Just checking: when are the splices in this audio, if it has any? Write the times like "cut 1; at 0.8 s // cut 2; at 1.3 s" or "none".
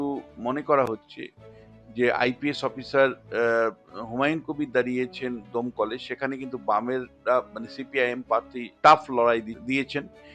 cut 1; at 8.7 s // cut 2; at 9.5 s

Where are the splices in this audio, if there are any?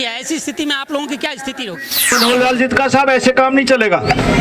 cut 1; at 2.1 s

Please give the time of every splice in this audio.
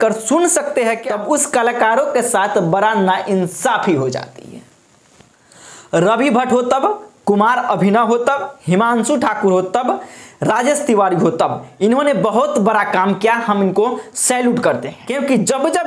none

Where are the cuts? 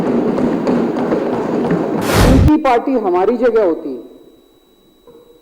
cut 1; at 2.2 s

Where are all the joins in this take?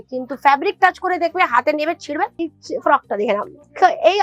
cut 1; at 2.5 s

